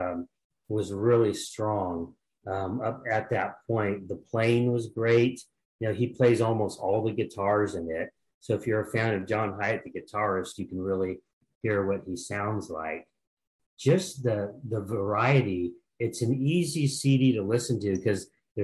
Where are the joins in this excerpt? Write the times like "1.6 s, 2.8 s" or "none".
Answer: none